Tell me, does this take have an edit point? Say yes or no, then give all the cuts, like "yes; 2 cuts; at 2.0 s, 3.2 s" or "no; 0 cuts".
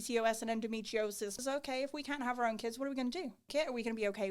yes; 2 cuts; at 1.4 s, 3.5 s